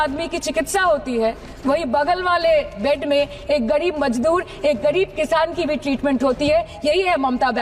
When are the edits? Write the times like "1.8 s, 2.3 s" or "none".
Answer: none